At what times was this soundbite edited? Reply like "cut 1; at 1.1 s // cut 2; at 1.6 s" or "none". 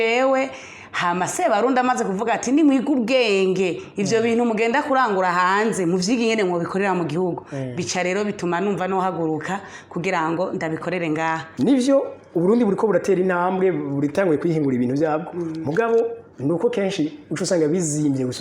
cut 1; at 11.5 s